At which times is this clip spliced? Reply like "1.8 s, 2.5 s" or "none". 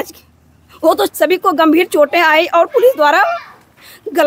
1.1 s